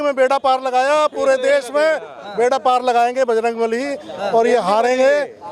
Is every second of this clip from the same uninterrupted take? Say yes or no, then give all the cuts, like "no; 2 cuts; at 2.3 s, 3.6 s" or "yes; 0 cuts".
yes; 0 cuts